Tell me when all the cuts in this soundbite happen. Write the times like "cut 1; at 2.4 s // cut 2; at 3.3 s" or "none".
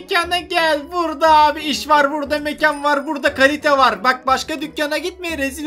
none